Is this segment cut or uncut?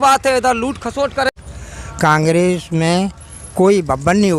cut